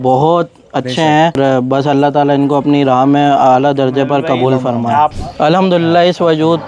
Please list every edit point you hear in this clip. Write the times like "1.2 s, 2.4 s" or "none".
1.4 s, 5.2 s